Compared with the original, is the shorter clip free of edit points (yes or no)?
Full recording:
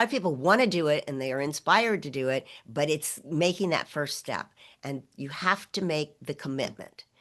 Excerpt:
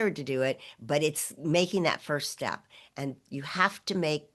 yes